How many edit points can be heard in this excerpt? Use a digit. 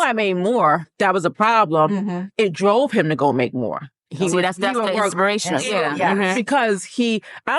2